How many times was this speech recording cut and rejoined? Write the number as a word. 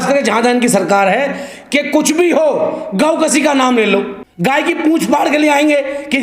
one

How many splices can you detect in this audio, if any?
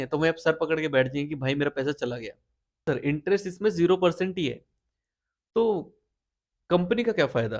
one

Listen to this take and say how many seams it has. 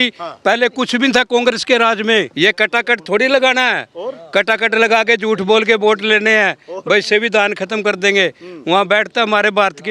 one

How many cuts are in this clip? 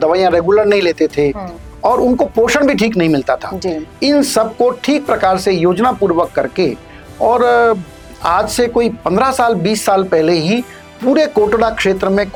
zero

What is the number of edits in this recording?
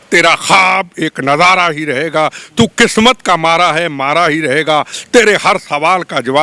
zero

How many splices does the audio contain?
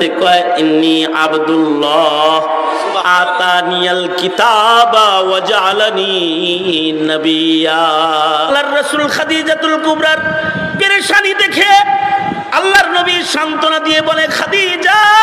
one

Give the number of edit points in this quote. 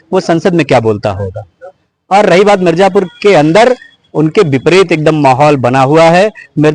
zero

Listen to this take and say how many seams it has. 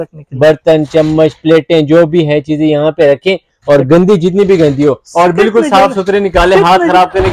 zero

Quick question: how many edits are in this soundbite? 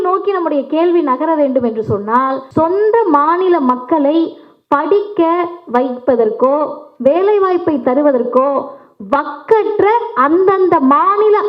one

